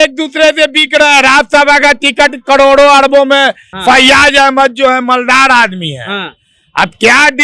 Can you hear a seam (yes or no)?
yes